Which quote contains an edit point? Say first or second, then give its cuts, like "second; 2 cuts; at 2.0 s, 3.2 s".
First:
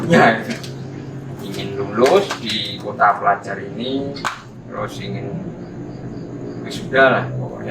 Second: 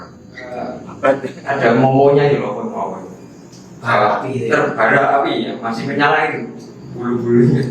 second; 1 cut; at 1.4 s